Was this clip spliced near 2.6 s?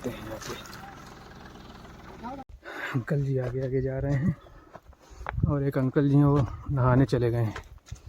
yes; 1 cut; at 2.6 s

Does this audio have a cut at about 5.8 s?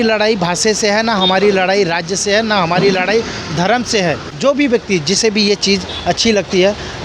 no; 1 cut; at 4.3 s

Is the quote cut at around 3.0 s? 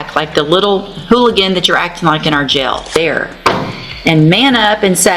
yes; 1 cut; at 3.0 s

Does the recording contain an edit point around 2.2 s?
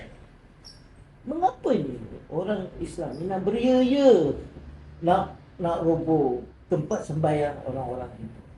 no; 1 cut; at 6.5 s

